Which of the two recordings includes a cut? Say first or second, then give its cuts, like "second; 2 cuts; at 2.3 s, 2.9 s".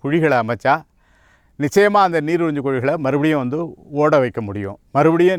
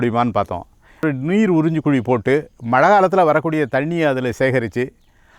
second; 1 cut; at 1.0 s